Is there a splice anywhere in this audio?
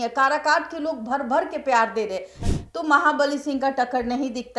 yes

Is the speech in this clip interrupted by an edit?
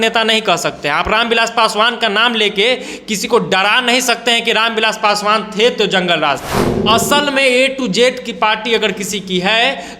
yes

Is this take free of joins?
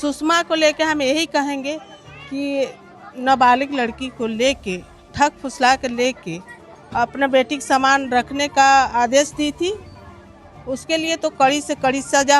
yes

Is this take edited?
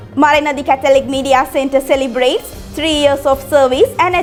no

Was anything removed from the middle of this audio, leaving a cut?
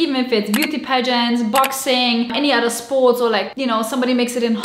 no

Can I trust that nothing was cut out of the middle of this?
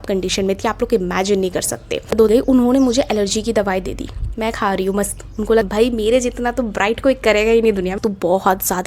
no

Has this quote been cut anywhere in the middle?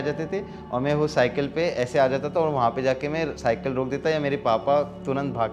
no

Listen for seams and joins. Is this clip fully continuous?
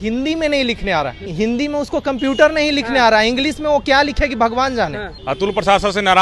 no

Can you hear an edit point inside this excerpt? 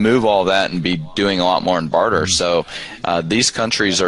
no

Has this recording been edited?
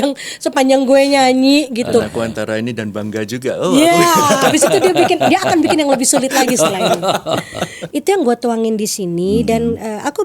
yes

